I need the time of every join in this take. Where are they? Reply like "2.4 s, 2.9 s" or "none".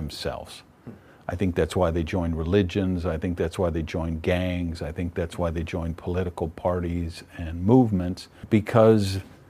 8.4 s